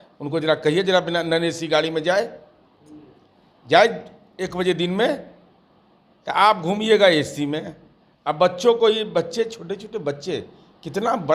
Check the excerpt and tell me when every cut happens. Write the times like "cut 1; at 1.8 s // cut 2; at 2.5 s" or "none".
none